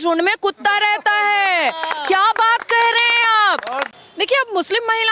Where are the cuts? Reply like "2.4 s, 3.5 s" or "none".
3.9 s